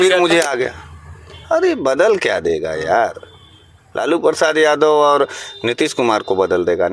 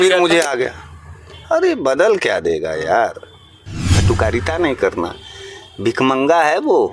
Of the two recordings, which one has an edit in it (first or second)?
second